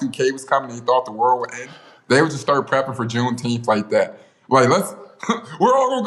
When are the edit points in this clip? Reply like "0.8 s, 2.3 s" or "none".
none

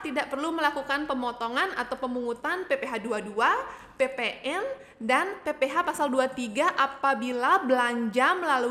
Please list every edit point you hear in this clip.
none

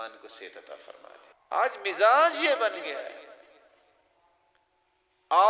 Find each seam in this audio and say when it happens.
1.3 s

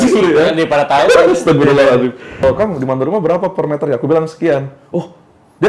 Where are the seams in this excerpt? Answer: 2.4 s

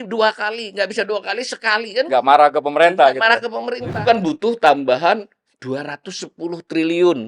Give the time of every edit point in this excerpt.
4.0 s

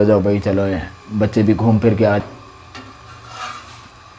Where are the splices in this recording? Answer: 2.2 s

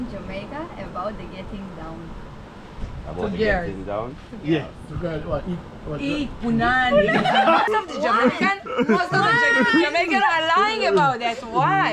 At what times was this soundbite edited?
7.7 s

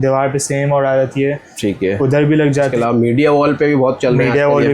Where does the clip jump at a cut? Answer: 2.7 s

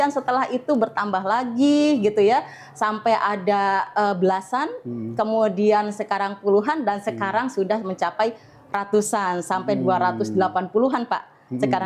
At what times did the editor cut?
none

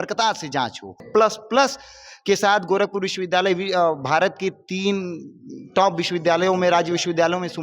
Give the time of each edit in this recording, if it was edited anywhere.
1.1 s

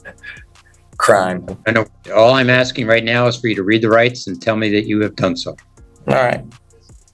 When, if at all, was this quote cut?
none

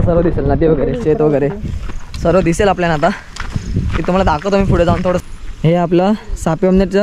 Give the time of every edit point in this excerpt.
5.2 s

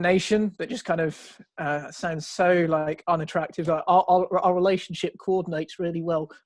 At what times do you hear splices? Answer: none

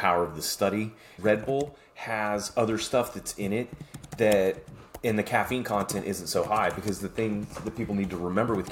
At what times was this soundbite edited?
1.2 s

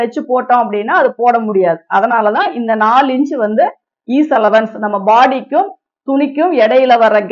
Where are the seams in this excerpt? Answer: none

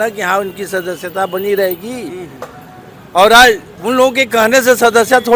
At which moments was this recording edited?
none

